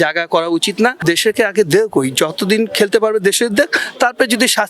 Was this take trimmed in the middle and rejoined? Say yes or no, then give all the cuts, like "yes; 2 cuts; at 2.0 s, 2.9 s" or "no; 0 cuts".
yes; 1 cut; at 1.0 s